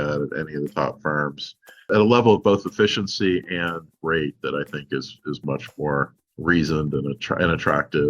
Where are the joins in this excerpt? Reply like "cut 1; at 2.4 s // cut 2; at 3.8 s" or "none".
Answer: cut 1; at 1.9 s // cut 2; at 6.2 s